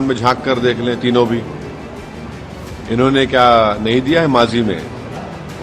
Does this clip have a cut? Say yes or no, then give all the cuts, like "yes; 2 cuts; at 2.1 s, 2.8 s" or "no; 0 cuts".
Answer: no; 0 cuts